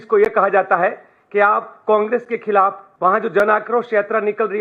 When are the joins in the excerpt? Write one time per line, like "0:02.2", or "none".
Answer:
0:02.8